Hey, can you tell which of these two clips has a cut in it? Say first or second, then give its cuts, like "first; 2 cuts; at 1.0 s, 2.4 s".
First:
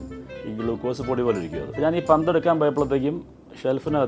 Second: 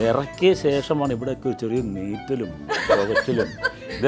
first; 1 cut; at 1.7 s